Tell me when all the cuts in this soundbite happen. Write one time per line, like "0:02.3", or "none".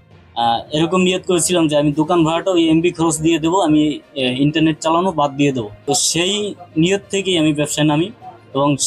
0:05.7